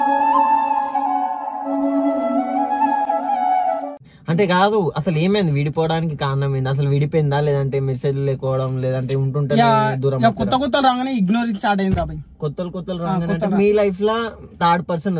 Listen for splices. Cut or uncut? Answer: uncut